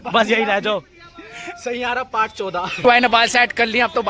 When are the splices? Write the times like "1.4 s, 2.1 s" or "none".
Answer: 2.8 s